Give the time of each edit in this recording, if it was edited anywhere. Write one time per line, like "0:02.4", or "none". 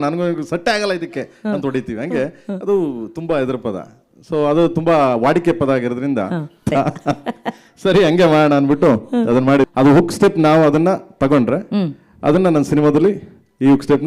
0:09.7